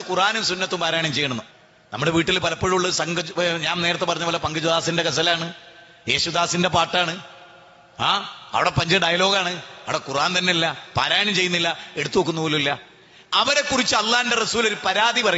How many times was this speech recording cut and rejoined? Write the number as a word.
one